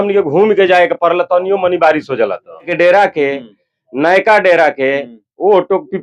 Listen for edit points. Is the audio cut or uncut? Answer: cut